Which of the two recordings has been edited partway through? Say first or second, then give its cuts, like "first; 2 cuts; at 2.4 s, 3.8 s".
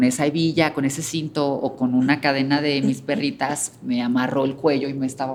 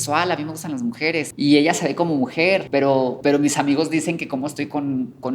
second; 2 cuts; at 1.3 s, 3.0 s